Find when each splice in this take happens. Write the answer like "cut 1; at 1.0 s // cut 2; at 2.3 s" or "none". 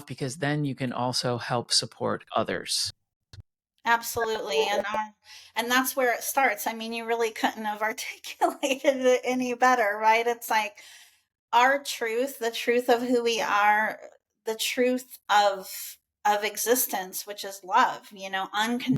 none